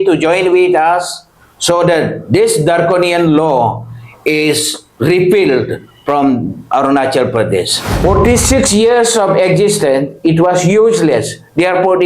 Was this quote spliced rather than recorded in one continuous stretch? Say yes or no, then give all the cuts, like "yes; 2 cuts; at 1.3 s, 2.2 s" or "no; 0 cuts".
yes; 1 cut; at 7.8 s